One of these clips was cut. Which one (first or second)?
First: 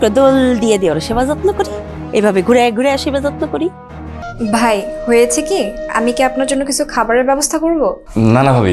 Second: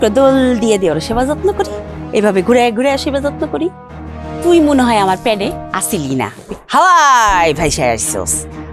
first